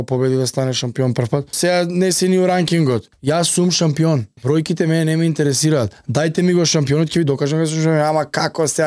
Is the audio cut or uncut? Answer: cut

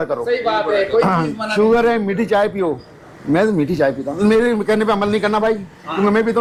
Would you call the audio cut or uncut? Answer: uncut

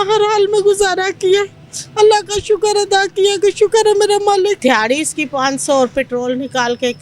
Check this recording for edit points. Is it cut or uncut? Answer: cut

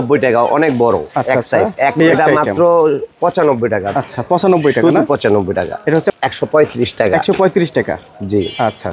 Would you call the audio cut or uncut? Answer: cut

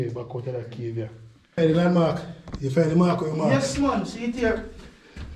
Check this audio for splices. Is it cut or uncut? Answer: cut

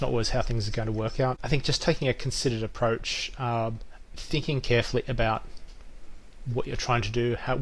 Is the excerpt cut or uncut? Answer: cut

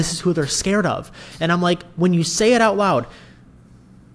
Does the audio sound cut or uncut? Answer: uncut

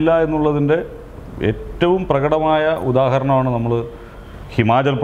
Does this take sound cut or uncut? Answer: uncut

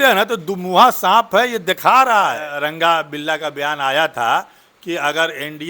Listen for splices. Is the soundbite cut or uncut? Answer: cut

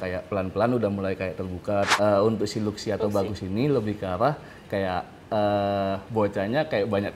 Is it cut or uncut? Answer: cut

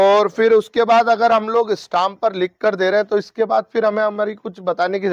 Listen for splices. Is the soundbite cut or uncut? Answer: uncut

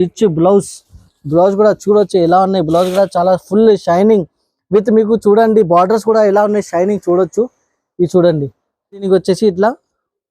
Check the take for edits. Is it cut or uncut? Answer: cut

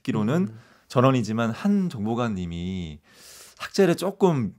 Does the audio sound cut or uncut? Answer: uncut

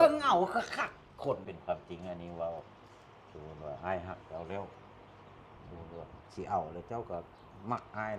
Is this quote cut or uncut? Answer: cut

